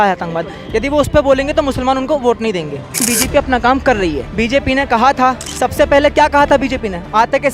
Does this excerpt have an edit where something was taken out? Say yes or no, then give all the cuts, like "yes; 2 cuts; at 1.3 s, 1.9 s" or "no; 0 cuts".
yes; 3 cuts; at 3.0 s, 4.2 s, 5.5 s